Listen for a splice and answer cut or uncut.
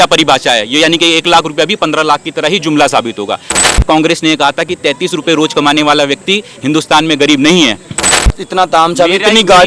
cut